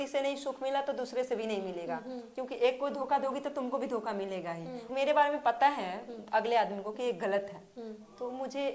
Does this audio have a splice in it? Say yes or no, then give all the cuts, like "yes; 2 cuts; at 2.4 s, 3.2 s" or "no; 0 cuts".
yes; 1 cut; at 4.9 s